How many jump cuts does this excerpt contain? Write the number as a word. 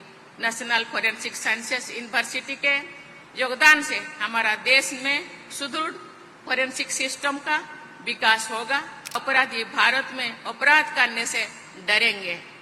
one